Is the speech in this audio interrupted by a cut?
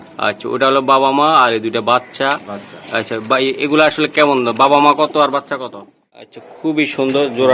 yes; 1 cut; at 6.4 s

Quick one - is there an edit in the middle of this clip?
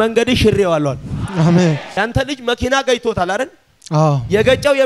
yes; 1 cut; at 1.9 s

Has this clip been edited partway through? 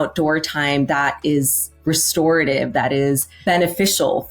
yes; 1 cut; at 3.3 s

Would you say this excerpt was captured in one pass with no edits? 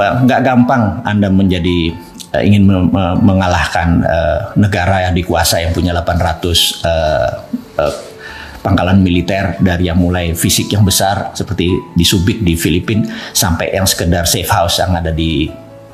yes; 0 cuts

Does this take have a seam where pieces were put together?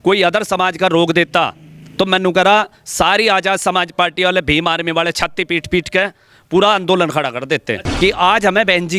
yes; 1 cut; at 7.8 s

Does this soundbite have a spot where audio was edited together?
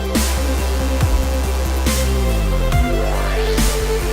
yes; 1 cut; at 2.2 s

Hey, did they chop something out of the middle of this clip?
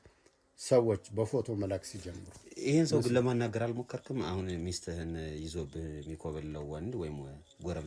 no; 0 cuts

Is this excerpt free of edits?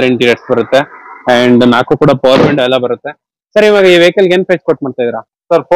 yes; 0 cuts

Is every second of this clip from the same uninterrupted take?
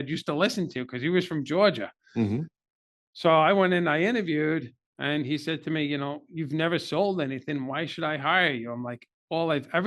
yes; 0 cuts

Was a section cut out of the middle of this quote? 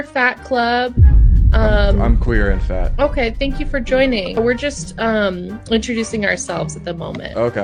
no; 0 cuts

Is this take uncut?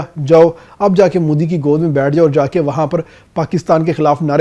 yes; 0 cuts

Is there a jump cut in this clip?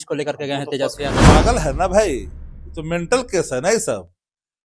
yes; 1 cut; at 1.2 s

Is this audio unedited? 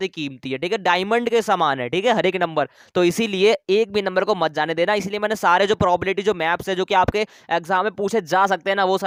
yes; 0 cuts

